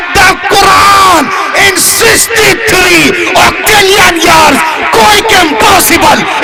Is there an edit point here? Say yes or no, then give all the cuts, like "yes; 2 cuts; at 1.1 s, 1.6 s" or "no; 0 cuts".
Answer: no; 0 cuts